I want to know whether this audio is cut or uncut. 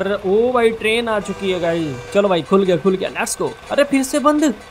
cut